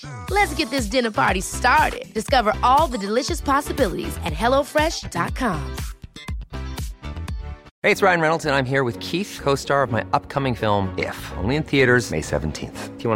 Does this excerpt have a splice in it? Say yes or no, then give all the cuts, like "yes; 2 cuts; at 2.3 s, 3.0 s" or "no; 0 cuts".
yes; 1 cut; at 7.7 s